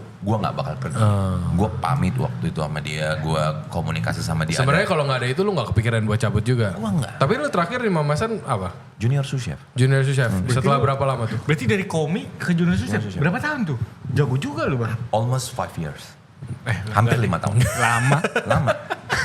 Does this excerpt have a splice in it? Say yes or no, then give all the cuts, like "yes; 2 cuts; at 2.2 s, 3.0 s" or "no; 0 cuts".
no; 0 cuts